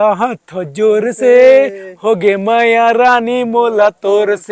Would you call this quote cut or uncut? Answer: uncut